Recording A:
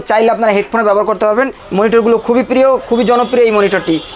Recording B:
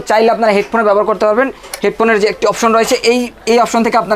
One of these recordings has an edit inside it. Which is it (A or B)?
A